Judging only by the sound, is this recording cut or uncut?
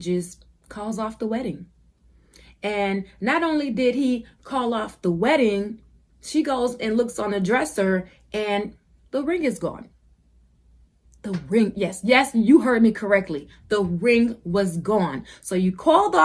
uncut